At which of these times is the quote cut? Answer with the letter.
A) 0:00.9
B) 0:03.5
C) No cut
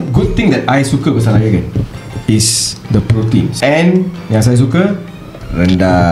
B